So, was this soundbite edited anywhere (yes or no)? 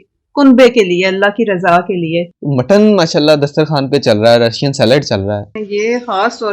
yes